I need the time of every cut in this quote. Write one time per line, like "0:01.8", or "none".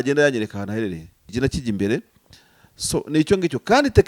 0:01.3